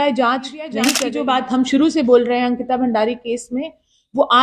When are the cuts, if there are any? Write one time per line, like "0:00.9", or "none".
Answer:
0:01.0